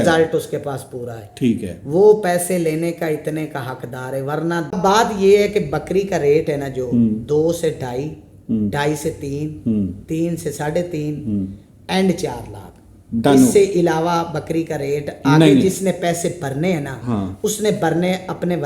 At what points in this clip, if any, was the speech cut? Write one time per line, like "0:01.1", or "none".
0:04.8